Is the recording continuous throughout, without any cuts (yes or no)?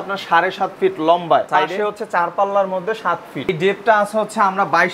no